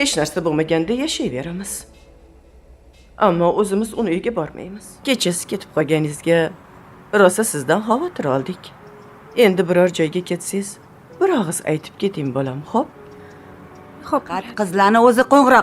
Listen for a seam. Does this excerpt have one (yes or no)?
yes